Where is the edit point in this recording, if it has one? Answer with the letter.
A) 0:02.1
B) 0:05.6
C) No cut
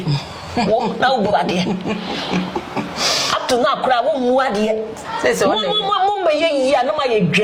C